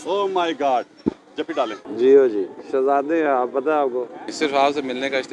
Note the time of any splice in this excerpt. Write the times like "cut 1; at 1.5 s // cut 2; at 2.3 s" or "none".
cut 1; at 1.9 s // cut 2; at 4.3 s